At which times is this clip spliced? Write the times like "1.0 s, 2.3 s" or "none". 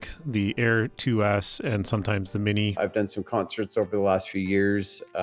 2.8 s